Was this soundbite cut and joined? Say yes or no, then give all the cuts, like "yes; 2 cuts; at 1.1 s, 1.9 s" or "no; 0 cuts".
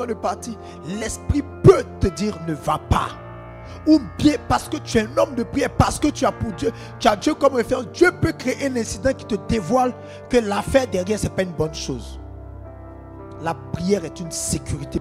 no; 0 cuts